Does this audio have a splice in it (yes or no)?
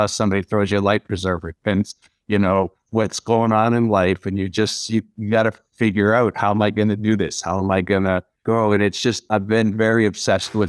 yes